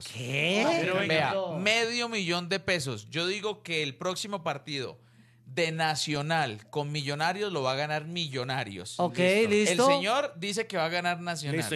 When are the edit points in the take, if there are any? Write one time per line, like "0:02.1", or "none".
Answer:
0:01.0

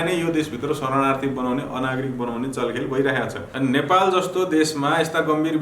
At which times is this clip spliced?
0:03.4

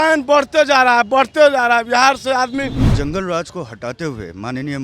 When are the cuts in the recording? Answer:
0:02.8

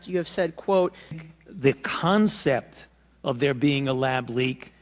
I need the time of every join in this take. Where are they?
0:01.2

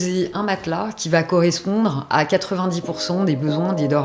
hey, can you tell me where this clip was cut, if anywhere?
none

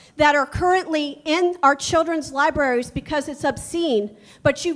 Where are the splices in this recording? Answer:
none

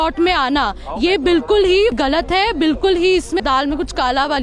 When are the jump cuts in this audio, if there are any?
0:02.0
0:03.4

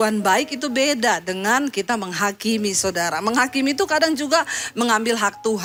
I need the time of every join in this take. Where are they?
none

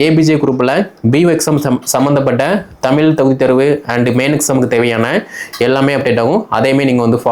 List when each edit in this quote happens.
none

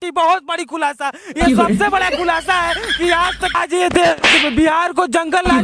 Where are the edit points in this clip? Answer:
0:03.5

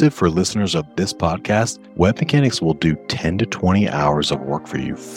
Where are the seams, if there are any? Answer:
0:01.8

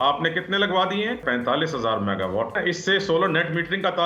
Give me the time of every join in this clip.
0:01.2
0:02.6

